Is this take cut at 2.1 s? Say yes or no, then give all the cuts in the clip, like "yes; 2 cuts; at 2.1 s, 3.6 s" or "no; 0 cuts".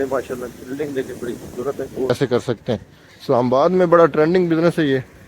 yes; 1 cut; at 2.1 s